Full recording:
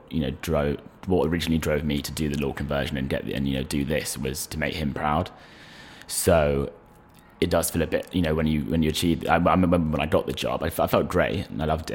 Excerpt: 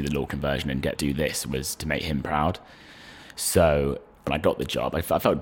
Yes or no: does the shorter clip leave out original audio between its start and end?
yes